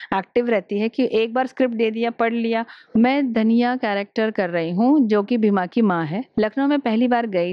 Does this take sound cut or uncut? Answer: cut